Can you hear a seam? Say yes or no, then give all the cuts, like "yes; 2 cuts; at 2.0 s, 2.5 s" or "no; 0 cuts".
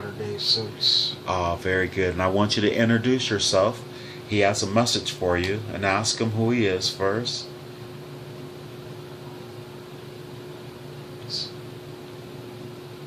yes; 1 cut; at 8.6 s